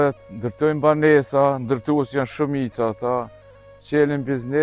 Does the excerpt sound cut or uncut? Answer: uncut